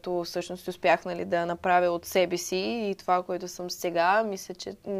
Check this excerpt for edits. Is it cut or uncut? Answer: uncut